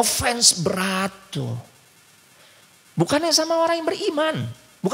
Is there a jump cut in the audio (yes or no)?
no